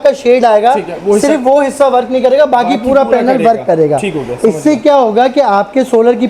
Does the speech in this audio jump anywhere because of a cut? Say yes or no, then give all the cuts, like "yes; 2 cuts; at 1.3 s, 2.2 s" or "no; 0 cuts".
no; 0 cuts